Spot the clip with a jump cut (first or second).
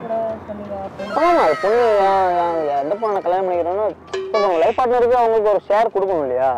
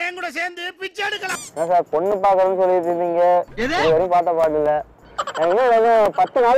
second